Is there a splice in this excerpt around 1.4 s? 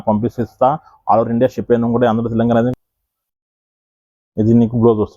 no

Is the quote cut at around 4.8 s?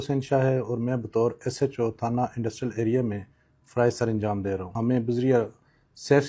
yes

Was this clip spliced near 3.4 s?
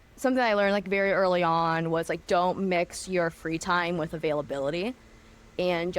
no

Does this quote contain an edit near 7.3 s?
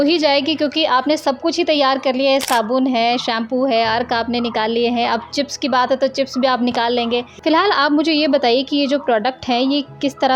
yes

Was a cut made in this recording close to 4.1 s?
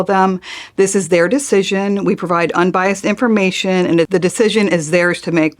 yes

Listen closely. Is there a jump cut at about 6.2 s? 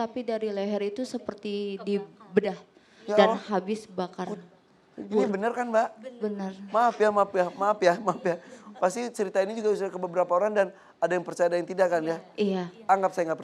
no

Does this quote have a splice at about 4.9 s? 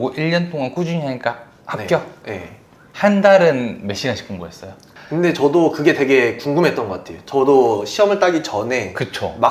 yes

